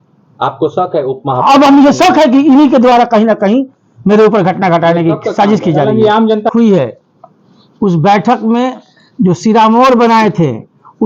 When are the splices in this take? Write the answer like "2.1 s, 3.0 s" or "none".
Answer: 6.5 s